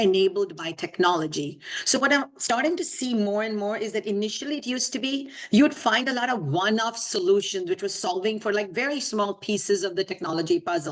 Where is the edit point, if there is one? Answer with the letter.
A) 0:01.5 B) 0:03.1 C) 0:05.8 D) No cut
D